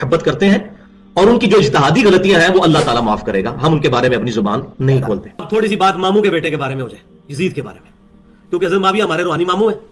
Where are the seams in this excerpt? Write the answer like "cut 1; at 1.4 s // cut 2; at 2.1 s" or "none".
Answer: cut 1; at 5.3 s